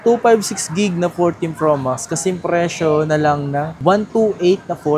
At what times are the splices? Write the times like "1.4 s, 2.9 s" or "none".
none

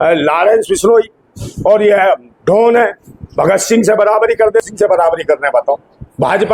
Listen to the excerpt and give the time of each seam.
4.6 s

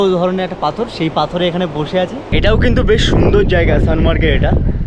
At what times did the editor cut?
2.3 s

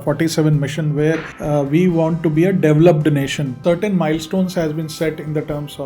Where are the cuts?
1.3 s, 3.6 s

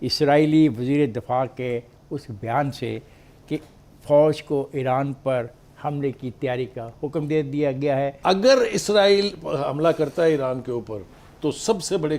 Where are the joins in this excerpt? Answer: 8.2 s

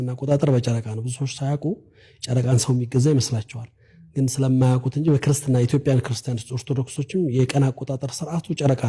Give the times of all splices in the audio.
none

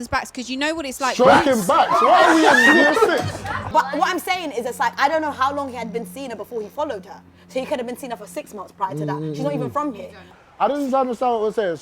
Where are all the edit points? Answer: 3.6 s, 10.3 s

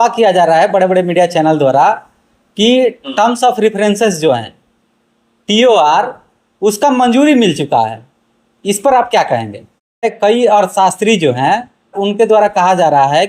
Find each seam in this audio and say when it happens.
10.1 s, 12.0 s

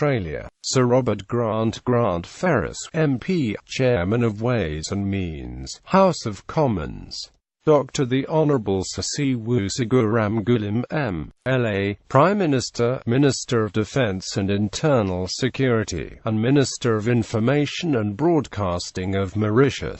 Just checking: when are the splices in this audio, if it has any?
9.0 s

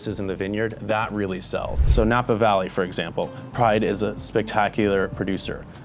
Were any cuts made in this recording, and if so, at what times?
1.8 s

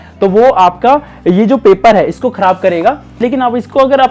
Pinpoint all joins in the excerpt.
3.2 s

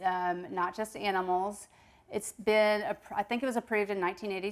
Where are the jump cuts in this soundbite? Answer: none

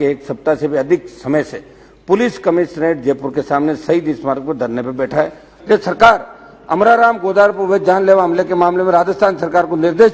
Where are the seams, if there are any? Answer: 5.5 s

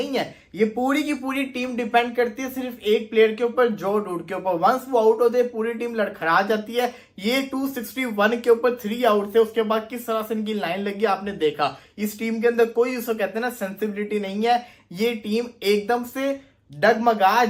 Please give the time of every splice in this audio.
none

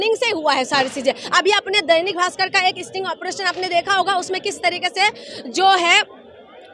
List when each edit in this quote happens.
none

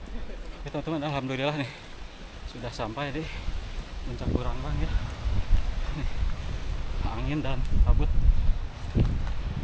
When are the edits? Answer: none

